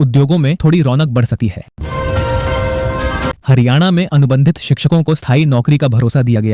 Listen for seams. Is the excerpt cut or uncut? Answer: cut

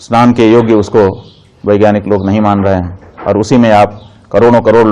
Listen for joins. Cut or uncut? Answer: uncut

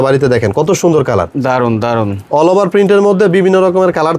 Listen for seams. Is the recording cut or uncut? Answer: uncut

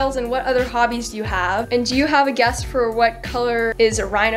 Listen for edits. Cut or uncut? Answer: cut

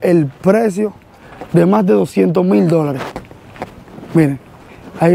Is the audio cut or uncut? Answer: uncut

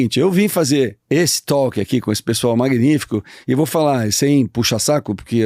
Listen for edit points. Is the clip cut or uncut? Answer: cut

